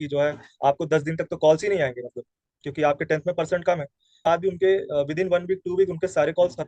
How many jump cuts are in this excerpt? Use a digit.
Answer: 1